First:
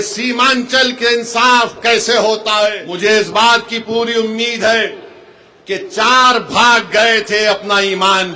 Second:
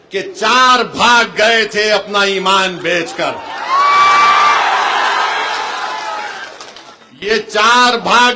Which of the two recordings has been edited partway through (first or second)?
first